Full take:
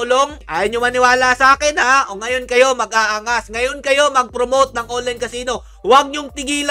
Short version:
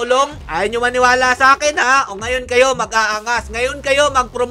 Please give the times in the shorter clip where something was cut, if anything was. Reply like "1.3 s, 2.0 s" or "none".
none